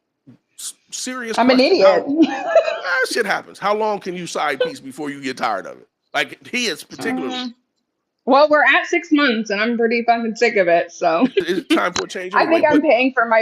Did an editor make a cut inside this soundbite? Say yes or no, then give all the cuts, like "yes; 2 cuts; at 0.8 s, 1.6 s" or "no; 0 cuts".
yes; 1 cut; at 11.5 s